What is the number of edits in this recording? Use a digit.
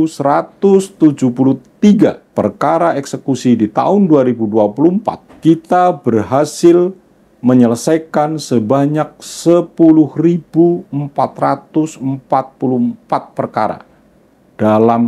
2